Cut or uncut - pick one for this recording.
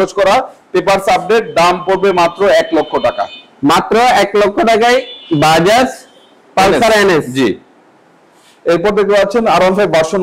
uncut